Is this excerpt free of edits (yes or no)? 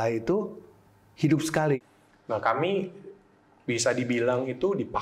no